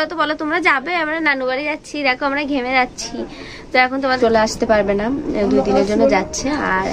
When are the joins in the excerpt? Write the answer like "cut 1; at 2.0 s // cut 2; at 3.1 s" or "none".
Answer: cut 1; at 4.2 s